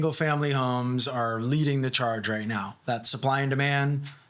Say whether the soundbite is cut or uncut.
uncut